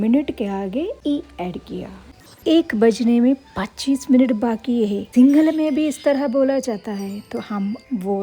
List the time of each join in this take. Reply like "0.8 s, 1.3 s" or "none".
1.0 s, 1.9 s, 5.0 s